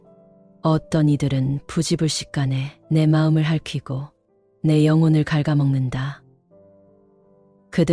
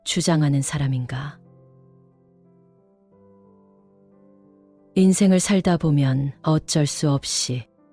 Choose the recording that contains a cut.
second; 2 cuts; at 1.4 s, 4.9 s

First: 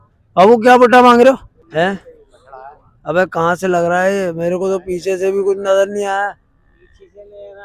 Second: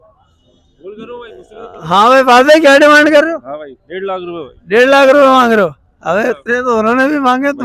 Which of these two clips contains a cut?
first; 1 cut; at 1.6 s

